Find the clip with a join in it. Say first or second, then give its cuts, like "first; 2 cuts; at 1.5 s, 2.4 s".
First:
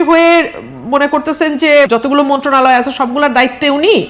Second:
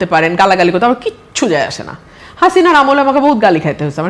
first; 1 cut; at 1.9 s